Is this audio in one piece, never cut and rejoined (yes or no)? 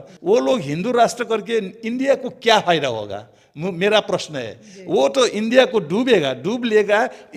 yes